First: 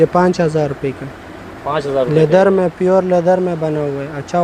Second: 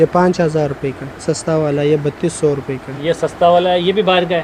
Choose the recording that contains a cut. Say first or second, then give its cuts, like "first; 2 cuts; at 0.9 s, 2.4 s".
second; 1 cut; at 1.2 s